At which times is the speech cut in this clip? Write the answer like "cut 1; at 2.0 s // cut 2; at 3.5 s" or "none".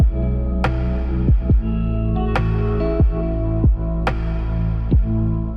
none

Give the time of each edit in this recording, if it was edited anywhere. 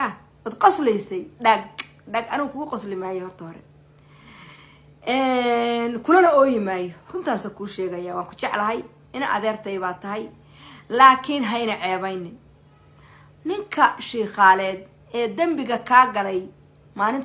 none

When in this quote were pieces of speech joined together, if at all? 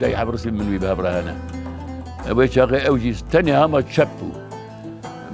none

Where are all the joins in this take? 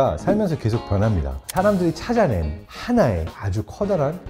cut 1; at 1.4 s

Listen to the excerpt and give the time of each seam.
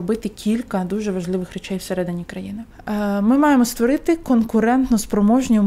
cut 1; at 2.6 s

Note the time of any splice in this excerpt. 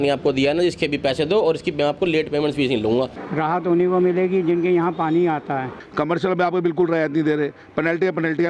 cut 1; at 3.2 s // cut 2; at 5.8 s

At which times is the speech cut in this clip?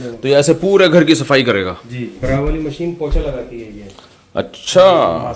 cut 1; at 2.2 s

